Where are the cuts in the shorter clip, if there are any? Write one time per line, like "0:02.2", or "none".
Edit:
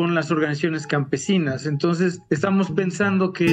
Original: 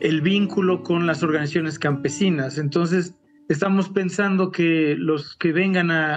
0:02.2